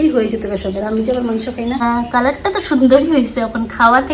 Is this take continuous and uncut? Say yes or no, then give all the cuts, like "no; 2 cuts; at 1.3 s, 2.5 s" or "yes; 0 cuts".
no; 1 cut; at 1.8 s